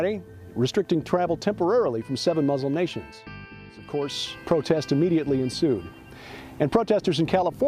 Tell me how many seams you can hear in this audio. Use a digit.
1